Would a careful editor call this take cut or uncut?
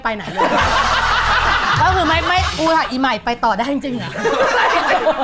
uncut